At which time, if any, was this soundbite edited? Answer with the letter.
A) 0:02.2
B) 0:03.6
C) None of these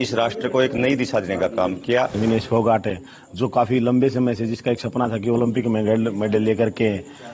A